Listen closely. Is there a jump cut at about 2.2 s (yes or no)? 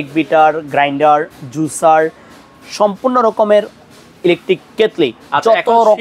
no